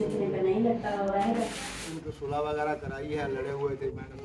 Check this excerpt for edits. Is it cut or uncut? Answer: cut